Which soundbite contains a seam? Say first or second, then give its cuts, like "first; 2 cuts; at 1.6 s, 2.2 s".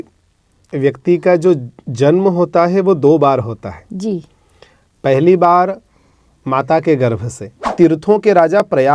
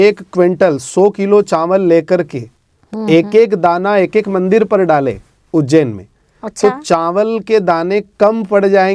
first; 1 cut; at 7.6 s